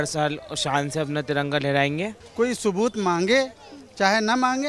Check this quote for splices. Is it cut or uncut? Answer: cut